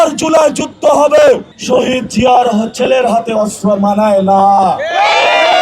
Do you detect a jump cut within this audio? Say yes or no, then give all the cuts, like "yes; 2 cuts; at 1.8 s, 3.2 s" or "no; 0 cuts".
yes; 1 cut; at 1.5 s